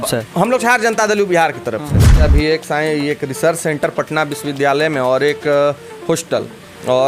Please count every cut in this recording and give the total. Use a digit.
1